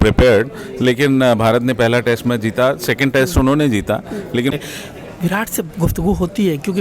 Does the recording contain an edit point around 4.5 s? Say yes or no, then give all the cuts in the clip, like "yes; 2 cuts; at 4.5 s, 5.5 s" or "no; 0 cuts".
yes; 1 cut; at 4.5 s